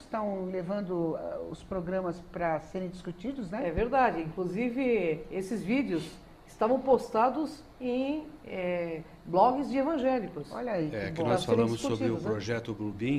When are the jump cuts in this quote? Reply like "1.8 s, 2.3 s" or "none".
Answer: 3.8 s